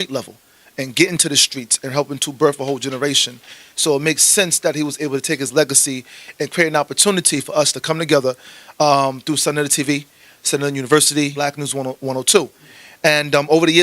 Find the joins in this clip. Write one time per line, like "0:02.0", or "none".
0:11.4